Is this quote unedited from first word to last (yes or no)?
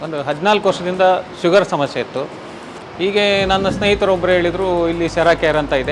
yes